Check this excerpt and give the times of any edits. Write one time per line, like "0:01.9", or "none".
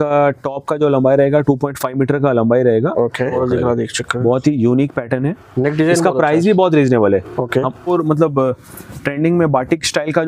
0:03.4
0:07.9